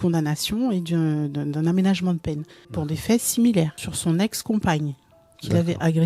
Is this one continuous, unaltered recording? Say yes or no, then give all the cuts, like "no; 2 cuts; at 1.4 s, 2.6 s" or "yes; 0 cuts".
no; 2 cuts; at 2.8 s, 3.9 s